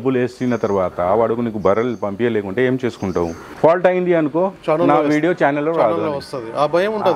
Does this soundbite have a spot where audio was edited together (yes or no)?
yes